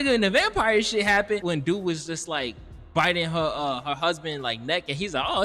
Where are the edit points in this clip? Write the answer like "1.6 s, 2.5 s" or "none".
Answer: 1.4 s